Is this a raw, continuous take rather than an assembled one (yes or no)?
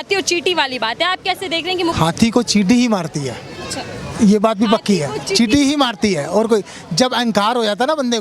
no